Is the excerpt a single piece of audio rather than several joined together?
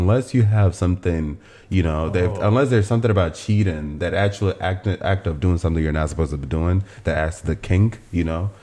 yes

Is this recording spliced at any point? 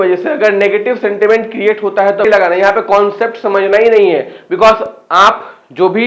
yes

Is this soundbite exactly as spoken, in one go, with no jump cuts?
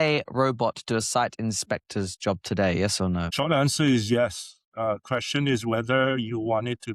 no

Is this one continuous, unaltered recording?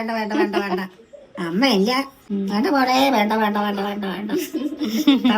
no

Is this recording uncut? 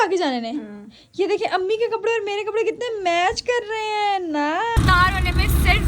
no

